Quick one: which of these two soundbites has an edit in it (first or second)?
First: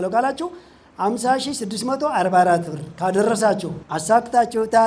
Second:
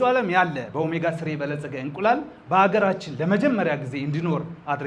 first